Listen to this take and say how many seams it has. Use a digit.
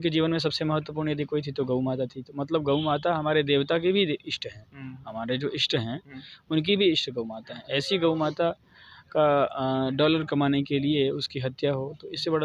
0